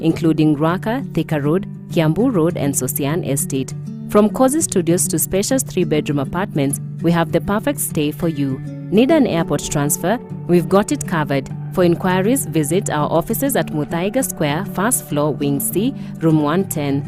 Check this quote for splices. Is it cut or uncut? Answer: uncut